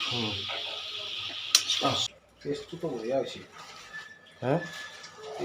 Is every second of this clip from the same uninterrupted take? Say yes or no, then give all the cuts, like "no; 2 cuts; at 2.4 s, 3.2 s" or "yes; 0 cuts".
no; 1 cut; at 2.0 s